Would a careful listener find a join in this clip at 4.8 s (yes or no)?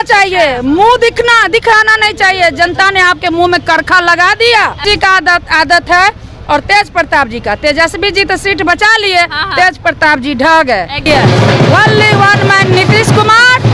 yes